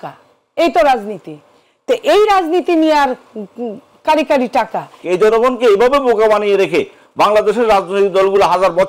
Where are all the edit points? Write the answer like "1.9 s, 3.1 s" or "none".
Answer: 5.0 s